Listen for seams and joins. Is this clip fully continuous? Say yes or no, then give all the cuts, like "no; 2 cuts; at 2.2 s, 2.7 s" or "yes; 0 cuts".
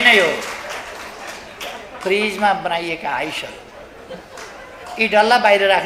yes; 0 cuts